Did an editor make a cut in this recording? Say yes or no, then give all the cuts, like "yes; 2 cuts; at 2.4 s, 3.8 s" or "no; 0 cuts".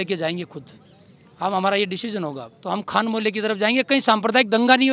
yes; 1 cut; at 2.5 s